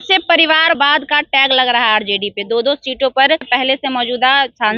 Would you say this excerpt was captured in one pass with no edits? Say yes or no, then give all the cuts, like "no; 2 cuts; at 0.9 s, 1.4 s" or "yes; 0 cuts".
no; 1 cut; at 3.5 s